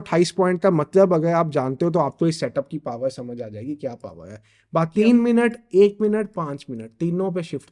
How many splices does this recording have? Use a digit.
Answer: 1